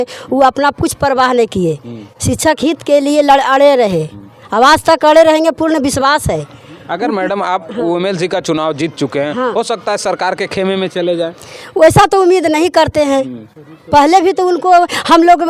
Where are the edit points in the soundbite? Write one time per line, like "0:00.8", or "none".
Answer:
none

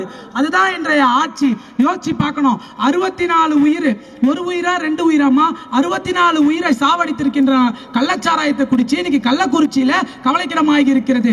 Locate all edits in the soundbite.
none

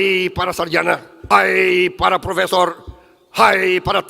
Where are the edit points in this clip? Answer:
0:01.1

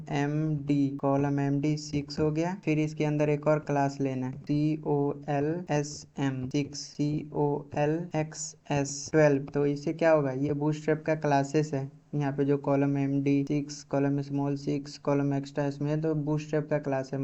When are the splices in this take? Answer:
0:01.0

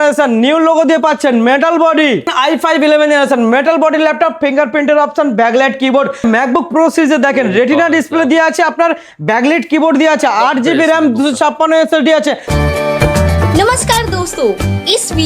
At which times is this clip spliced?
0:02.3
0:06.2
0:12.5

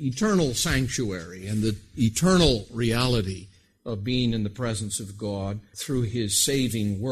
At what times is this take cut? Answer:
0:05.7

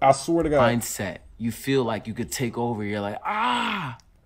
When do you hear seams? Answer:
none

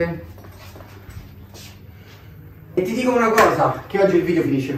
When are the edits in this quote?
0:02.8

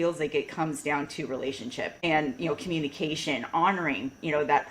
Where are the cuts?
0:02.0

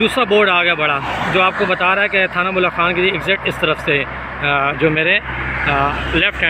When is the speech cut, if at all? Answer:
none

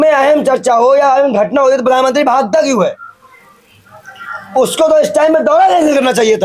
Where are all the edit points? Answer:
none

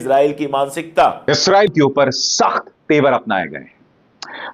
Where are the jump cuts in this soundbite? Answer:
0:01.2

